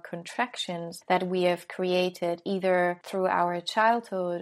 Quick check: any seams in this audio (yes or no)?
yes